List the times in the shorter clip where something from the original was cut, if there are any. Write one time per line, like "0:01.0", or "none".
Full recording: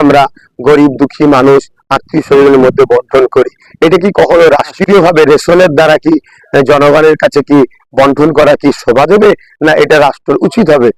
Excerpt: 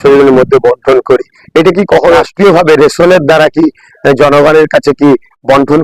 0:02.2